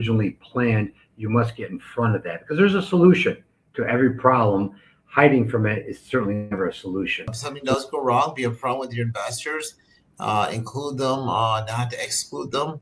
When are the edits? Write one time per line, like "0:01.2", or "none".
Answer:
0:07.4